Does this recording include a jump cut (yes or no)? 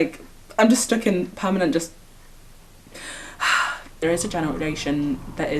yes